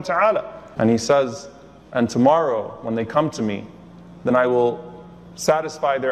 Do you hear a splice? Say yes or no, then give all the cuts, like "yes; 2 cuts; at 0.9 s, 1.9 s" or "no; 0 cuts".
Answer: no; 0 cuts